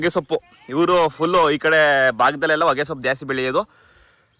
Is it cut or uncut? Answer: uncut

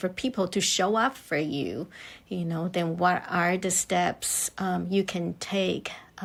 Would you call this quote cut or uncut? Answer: uncut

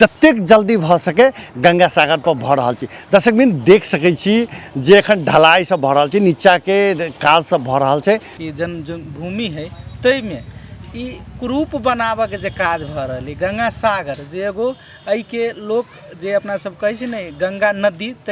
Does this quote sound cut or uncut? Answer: cut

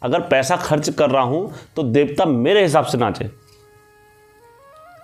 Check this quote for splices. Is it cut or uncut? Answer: uncut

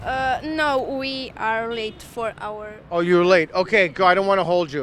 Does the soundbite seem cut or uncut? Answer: uncut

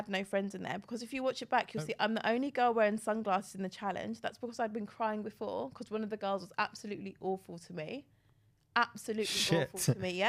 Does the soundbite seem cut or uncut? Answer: uncut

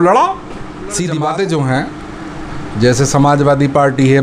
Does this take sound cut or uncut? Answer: cut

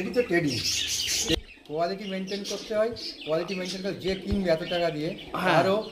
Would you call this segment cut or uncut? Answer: cut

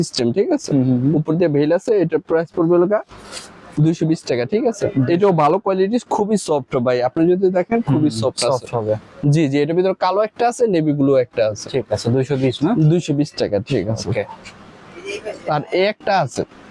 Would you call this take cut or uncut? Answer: uncut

